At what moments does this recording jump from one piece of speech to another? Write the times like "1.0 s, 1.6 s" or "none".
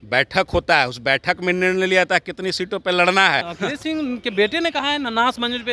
3.5 s